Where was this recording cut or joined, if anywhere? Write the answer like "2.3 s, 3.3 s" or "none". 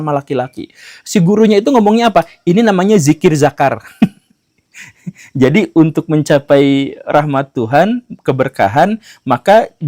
none